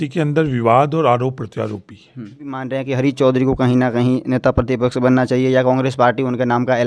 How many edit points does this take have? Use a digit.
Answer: 1